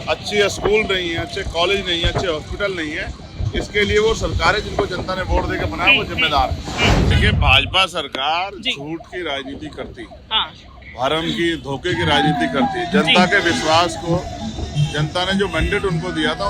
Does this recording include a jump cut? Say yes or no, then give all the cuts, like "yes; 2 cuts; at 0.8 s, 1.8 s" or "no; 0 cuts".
yes; 1 cut; at 7.0 s